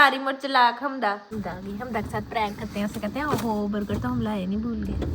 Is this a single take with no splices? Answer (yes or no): no